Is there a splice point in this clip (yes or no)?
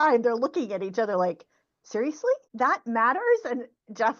yes